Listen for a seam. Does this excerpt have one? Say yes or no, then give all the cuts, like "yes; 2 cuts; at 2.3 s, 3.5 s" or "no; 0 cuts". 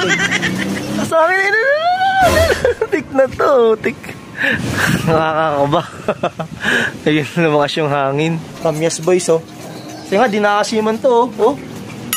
yes; 3 cuts; at 1.1 s, 4.7 s, 8.5 s